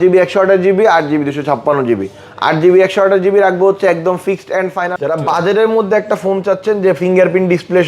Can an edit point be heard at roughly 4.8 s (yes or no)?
yes